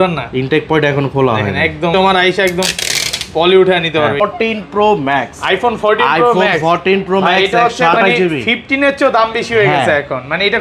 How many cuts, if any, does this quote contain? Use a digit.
2